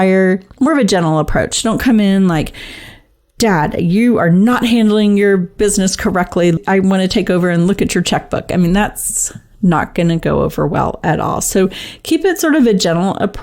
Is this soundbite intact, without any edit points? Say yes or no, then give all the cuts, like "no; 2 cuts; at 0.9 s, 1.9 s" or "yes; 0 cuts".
no; 1 cut; at 6.6 s